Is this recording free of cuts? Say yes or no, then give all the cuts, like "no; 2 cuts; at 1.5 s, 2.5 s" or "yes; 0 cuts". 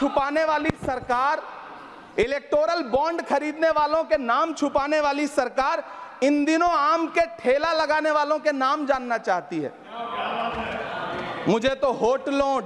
yes; 0 cuts